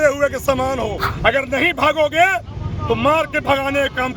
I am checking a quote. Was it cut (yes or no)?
yes